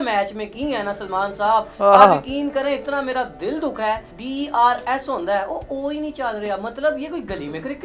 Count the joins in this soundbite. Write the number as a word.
one